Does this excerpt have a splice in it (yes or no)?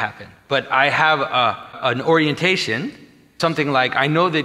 yes